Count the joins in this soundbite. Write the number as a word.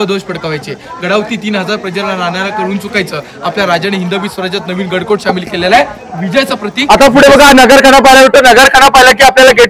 one